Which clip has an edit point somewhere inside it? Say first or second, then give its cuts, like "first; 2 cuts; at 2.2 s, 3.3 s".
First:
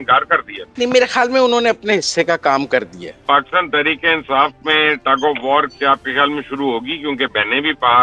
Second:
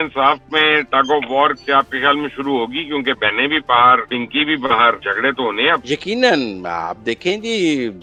first; 1 cut; at 3.2 s